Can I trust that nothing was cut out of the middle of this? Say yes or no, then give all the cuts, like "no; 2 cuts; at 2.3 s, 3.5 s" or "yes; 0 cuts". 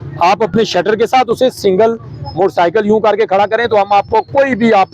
yes; 0 cuts